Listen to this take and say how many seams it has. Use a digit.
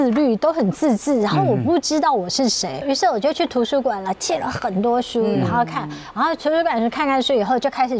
1